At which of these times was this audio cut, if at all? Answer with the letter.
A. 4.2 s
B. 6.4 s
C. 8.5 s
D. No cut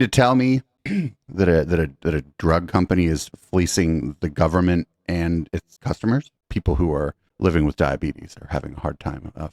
B